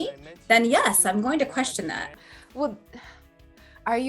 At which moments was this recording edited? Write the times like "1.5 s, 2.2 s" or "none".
2.0 s